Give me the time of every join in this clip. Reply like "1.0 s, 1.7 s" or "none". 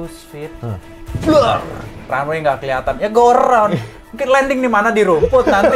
none